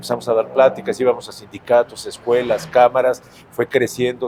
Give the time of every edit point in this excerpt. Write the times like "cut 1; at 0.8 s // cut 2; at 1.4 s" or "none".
none